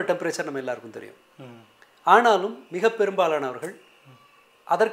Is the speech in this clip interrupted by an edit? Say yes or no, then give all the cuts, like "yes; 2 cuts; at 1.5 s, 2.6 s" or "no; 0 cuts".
no; 0 cuts